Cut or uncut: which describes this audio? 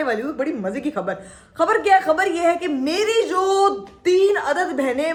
uncut